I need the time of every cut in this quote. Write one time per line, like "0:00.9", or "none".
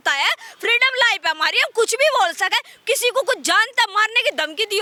none